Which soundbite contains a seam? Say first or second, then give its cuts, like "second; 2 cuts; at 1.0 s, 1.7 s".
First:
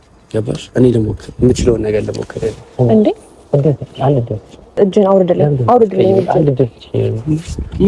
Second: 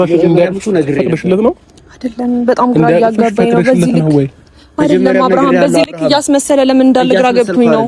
first; 1 cut; at 4.7 s